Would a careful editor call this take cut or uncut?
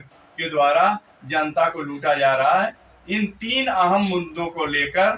uncut